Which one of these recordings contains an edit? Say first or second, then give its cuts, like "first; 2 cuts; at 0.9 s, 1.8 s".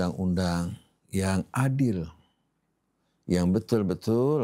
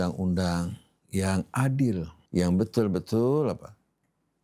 second; 1 cut; at 2.2 s